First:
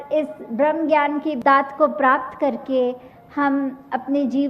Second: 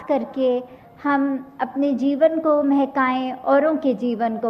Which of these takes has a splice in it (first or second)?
first